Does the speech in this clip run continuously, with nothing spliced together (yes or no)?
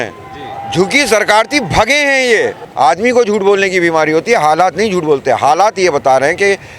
no